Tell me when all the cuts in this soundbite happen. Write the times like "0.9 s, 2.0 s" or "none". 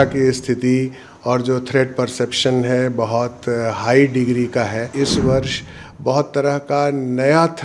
4.9 s